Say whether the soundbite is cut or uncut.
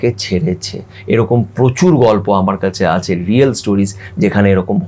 uncut